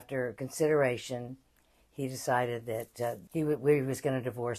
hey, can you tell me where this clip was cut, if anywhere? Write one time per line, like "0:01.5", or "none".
0:03.2